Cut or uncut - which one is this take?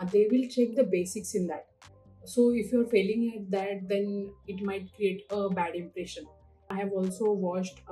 cut